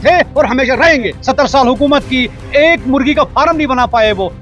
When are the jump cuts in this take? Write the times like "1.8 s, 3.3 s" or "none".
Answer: 1.2 s